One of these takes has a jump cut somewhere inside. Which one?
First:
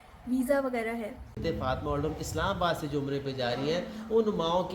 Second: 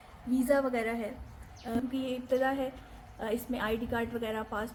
first; 1 cut; at 1.4 s

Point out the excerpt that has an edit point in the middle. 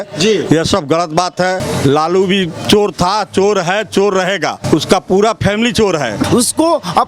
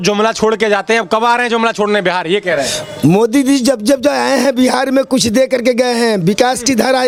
first; 3 cuts; at 1.6 s, 4.6 s, 6.2 s

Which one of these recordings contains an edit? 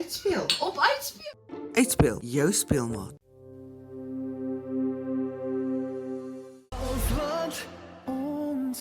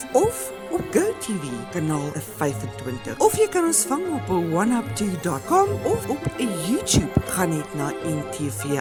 first; 1 cut; at 6.5 s

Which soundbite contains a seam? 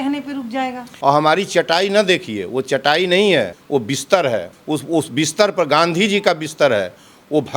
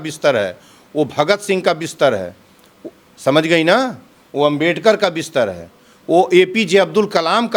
first; 3 cuts; at 0.9 s, 3.6 s, 4.5 s

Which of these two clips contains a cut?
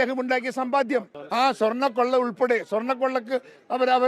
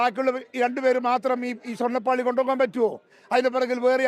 first; 1 cut; at 1.2 s

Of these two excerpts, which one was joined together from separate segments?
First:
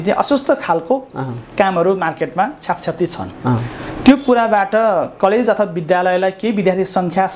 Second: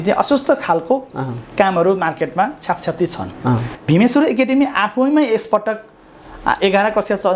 second; 1 cut; at 3.7 s

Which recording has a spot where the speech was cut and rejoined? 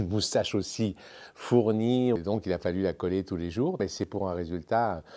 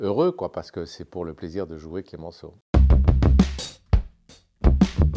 first; 2 cuts; at 2.2 s, 4.0 s

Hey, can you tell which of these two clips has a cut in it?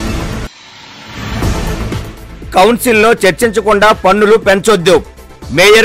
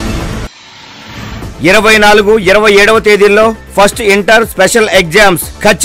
second; 1 cut; at 1.0 s

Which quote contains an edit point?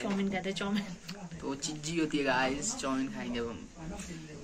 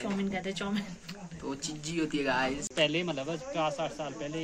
second; 1 cut; at 2.7 s

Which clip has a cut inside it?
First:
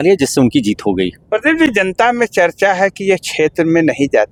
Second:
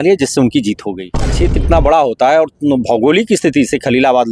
second; 1 cut; at 1.3 s

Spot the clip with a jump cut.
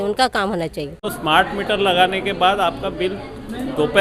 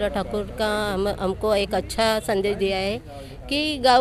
first; 1 cut; at 1.2 s

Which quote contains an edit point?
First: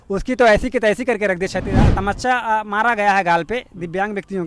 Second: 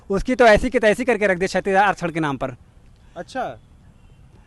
first; 1 cut; at 1.7 s

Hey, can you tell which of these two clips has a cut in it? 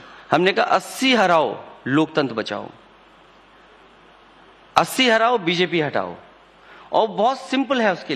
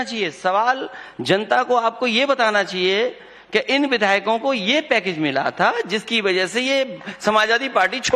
second; 1 cut; at 1.4 s

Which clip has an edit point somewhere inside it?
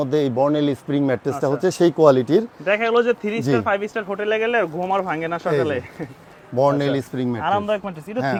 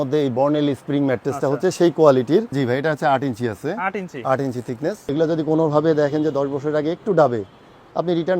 second; 2 cuts; at 2.5 s, 5.1 s

